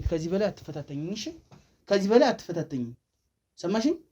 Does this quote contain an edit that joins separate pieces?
yes; 1 cut; at 1.8 s

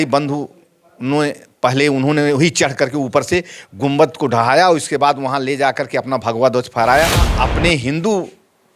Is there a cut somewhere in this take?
yes; 1 cut; at 7.3 s

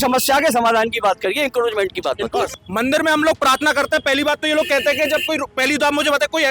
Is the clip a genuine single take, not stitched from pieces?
no; 1 cut; at 2.6 s

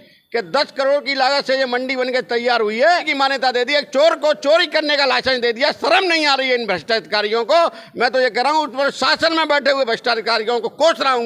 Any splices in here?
yes; 1 cut; at 3.1 s

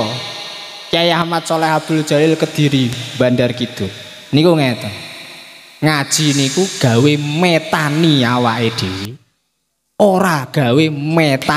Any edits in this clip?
no; 0 cuts

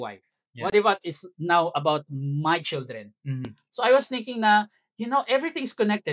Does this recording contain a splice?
yes; 1 cut; at 3.5 s

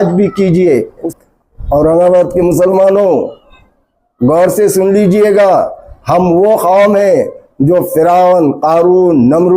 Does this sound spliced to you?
yes; 1 cut; at 1.1 s

